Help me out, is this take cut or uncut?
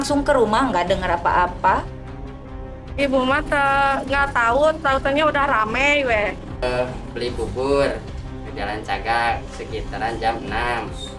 cut